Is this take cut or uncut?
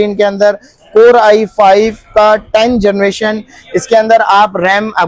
uncut